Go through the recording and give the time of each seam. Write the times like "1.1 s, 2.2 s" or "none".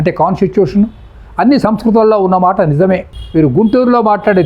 3.1 s